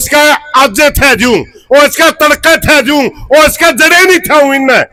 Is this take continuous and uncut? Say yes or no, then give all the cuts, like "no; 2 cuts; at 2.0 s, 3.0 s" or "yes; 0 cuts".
yes; 0 cuts